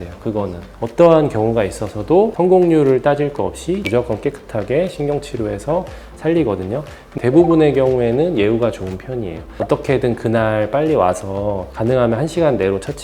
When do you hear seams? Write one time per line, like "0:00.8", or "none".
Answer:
0:03.8
0:07.1